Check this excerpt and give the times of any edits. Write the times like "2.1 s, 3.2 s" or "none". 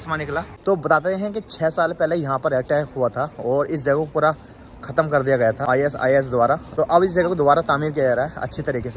0.8 s, 5.6 s, 6.7 s